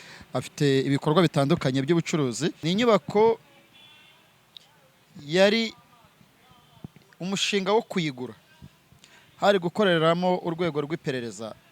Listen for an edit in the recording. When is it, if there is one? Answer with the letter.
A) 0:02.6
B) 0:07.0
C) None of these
A